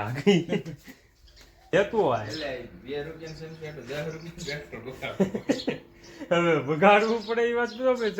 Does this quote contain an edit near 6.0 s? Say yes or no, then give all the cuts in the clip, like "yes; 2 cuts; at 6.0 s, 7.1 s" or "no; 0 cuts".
no; 1 cut; at 1.7 s